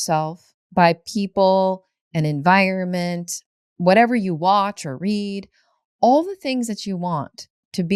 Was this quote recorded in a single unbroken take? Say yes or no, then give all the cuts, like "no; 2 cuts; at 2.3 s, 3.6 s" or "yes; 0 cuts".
yes; 0 cuts